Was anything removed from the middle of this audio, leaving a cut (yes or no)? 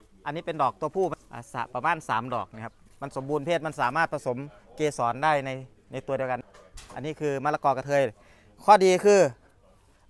yes